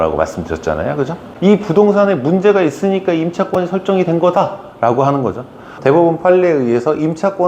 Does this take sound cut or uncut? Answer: uncut